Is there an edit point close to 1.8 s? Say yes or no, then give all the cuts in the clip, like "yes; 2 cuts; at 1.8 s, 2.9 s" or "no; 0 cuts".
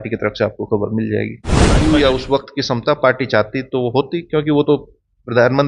yes; 1 cut; at 1.8 s